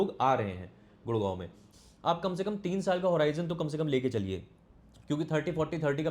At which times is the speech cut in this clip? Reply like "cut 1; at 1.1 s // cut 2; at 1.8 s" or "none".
cut 1; at 1.7 s